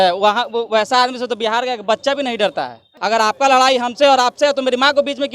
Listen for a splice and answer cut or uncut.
cut